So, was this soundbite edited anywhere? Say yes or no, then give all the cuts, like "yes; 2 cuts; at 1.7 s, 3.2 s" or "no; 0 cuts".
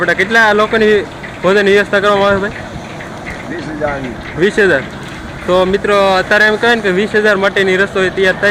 no; 0 cuts